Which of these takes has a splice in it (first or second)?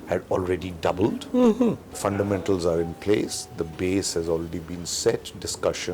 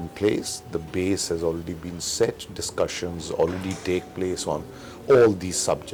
first